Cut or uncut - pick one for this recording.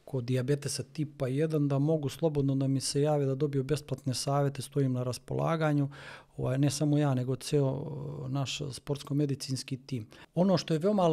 cut